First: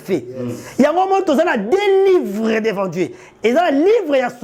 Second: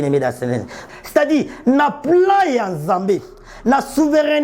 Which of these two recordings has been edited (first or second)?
second